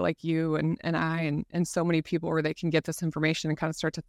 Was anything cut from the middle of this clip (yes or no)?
no